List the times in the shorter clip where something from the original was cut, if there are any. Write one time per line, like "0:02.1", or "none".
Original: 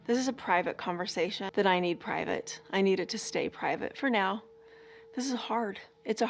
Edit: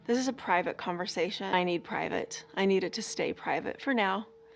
0:01.5